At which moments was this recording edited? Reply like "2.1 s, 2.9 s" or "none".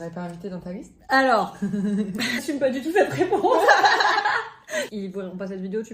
2.4 s, 4.9 s